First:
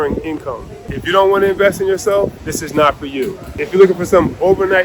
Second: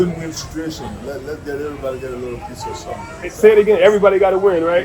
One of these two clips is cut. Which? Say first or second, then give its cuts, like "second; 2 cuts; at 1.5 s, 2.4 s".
first; 3 cuts; at 1.0 s, 2.5 s, 3.5 s